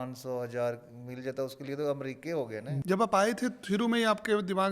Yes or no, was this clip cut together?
yes